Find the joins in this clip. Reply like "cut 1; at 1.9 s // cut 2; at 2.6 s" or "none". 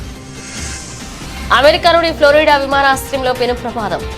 cut 1; at 1.2 s